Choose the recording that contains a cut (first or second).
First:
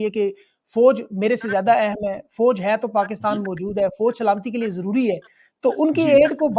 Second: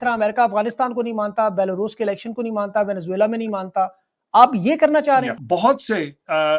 second